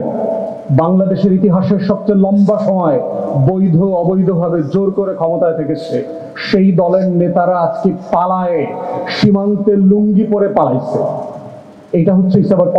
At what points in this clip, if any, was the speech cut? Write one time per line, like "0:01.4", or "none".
none